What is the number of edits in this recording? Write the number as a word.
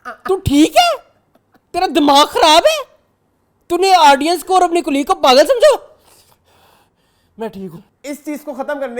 one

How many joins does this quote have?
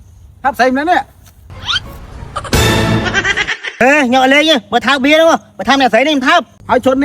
one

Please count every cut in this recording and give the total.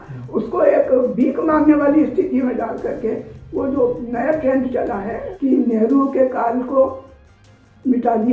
one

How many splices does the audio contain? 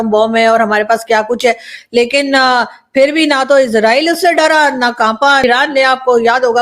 one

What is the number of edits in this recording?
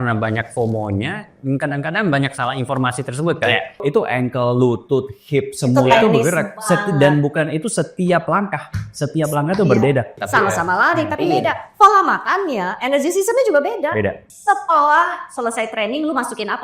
three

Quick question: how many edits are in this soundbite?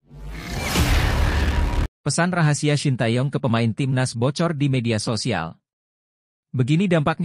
one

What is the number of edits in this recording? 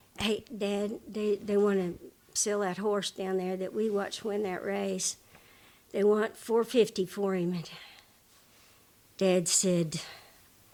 zero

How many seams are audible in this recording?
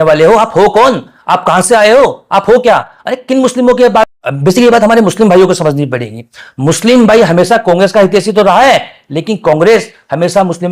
one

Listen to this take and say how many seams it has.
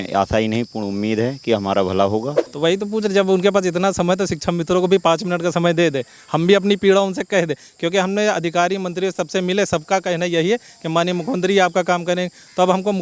one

